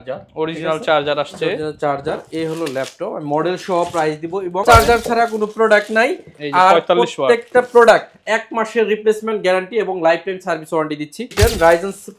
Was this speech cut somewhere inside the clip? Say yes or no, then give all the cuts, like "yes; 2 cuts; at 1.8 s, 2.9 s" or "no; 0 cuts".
yes; 2 cuts; at 4.6 s, 11.2 s